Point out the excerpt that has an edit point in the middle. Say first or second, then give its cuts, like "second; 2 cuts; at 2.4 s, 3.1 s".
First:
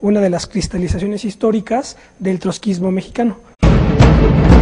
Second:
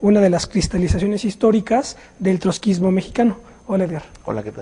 second; 1 cut; at 3.5 s